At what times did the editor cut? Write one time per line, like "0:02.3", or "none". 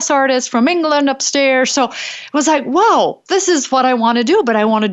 none